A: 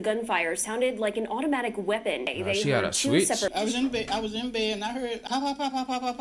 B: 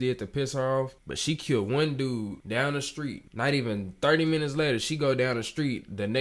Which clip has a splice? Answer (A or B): A